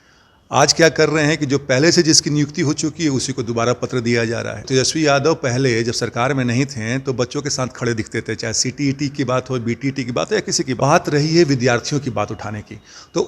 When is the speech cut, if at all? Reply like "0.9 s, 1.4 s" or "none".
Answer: 4.7 s, 10.8 s